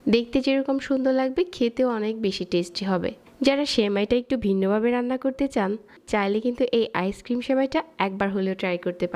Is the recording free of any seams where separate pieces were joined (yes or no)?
no